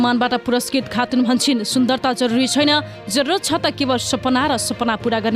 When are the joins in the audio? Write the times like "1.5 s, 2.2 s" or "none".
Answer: none